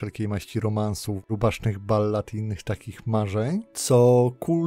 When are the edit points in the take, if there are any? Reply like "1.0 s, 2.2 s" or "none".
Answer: 1.1 s

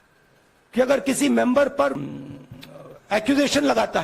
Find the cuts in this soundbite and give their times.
2.0 s

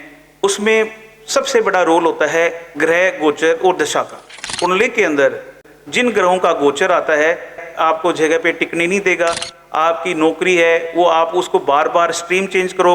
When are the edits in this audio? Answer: 4.4 s, 5.6 s, 7.6 s

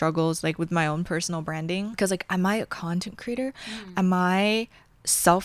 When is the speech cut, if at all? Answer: none

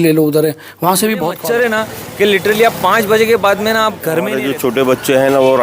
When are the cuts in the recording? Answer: 1.4 s, 4.3 s

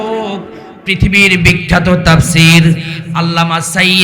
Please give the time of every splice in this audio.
none

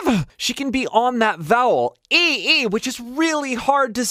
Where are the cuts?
none

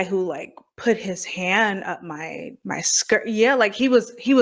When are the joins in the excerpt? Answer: 2.5 s

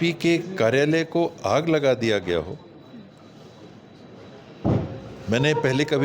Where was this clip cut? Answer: none

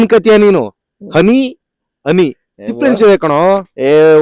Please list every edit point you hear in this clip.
none

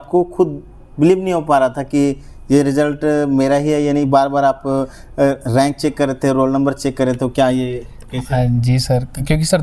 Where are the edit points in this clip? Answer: none

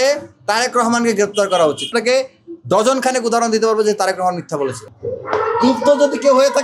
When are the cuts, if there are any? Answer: 1.9 s, 4.9 s

